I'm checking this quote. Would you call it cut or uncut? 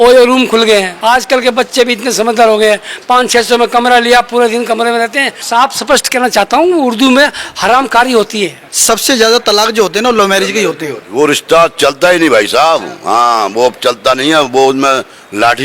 cut